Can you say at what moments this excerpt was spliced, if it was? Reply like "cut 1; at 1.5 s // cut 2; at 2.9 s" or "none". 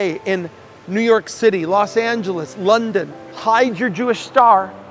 cut 1; at 3.3 s